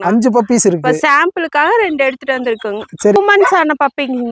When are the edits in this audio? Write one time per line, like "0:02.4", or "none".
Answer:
0:03.2